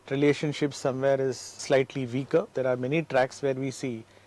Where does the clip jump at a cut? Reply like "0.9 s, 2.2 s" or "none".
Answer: 1.6 s, 2.5 s